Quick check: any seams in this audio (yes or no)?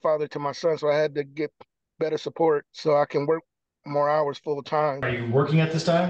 yes